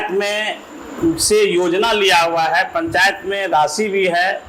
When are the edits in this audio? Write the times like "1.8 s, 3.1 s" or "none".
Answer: none